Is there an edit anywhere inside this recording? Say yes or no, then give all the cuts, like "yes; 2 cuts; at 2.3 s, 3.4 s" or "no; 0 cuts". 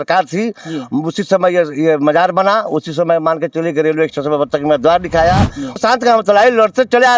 yes; 1 cut; at 5.8 s